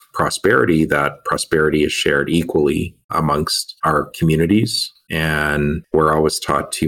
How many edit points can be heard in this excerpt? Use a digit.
2